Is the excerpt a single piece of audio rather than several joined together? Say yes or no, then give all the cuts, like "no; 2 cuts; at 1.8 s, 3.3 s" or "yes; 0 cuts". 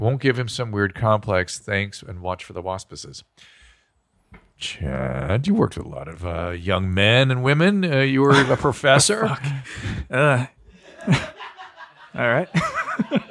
yes; 0 cuts